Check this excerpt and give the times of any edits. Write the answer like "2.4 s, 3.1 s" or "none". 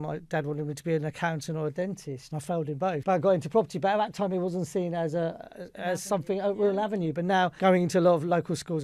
none